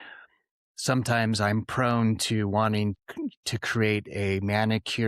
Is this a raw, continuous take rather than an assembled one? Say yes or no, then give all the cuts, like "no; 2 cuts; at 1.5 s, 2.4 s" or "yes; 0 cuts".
no; 1 cut; at 3.0 s